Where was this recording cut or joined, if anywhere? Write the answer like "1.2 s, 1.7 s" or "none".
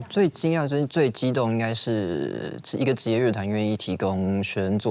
0.9 s